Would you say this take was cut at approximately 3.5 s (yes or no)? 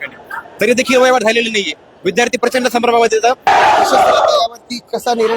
yes